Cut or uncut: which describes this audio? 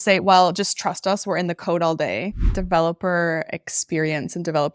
cut